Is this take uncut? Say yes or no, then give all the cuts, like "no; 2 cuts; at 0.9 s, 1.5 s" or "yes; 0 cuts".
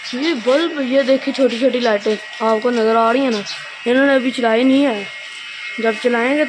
yes; 0 cuts